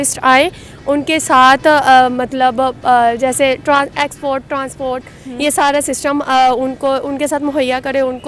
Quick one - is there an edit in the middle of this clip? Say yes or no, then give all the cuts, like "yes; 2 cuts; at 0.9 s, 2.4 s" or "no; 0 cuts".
no; 0 cuts